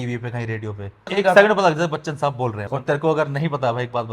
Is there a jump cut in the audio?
yes; 2 cuts; at 1.1 s, 2.7 s

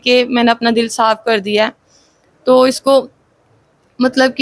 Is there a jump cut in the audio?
no; 0 cuts

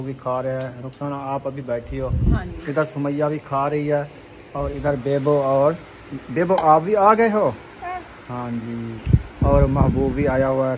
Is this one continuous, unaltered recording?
yes; 0 cuts

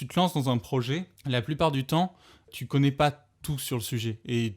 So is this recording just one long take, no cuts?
no; 2 cuts; at 1.1 s, 2.5 s

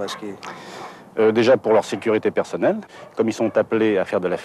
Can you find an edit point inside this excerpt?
no; 0 cuts

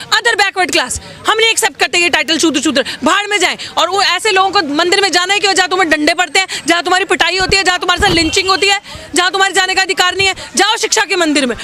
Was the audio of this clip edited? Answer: no; 0 cuts

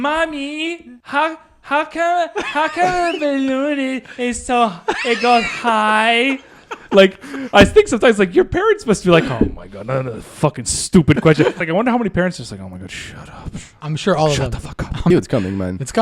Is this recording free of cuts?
no; 3 cuts; at 0.9 s, 11.6 s, 15.1 s

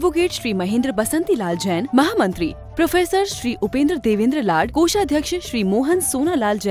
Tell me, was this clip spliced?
no; 0 cuts

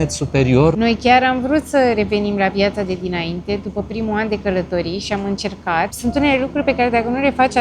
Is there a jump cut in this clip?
yes; 2 cuts; at 0.8 s, 6.0 s

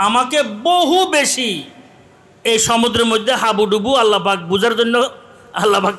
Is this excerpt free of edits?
yes; 0 cuts

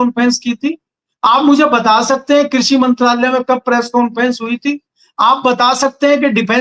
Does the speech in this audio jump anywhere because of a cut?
no; 0 cuts

